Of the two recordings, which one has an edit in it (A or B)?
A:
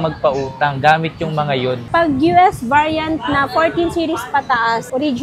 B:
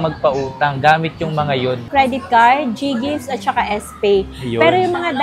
A